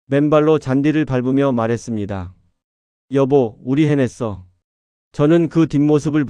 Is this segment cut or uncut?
cut